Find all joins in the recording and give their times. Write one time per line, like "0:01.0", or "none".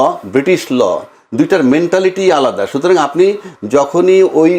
none